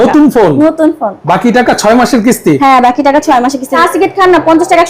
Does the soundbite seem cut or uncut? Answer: cut